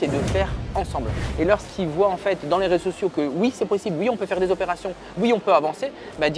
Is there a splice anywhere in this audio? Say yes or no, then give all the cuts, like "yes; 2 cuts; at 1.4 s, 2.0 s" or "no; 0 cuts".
yes; 1 cut; at 1.2 s